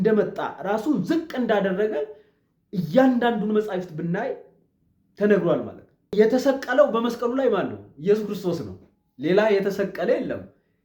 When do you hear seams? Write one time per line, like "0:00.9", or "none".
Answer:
0:06.1

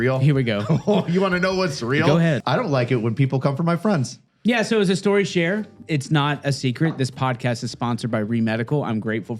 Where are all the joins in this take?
0:02.4
0:04.2
0:05.8

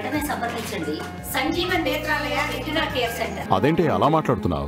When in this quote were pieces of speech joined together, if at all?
0:03.4

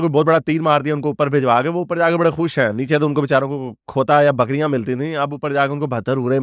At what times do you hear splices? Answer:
none

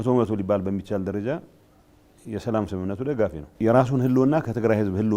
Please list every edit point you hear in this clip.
0:03.4

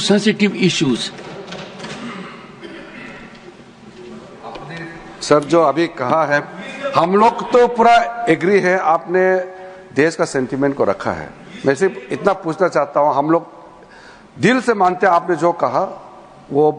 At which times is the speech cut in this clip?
none

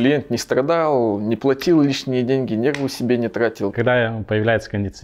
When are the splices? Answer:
0:03.7

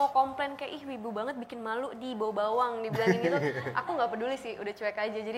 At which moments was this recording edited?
none

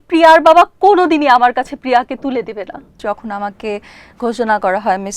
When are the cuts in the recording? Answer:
0:03.0

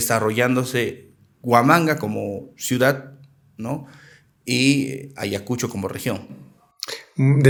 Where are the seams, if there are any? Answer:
none

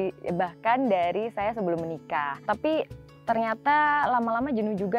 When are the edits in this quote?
0:02.4
0:03.1

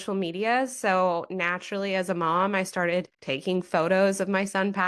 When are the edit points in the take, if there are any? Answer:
0:03.2

